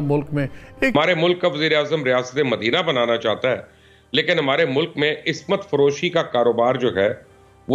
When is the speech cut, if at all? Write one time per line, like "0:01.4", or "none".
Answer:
0:00.9